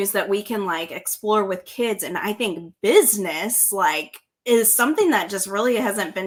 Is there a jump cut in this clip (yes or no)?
no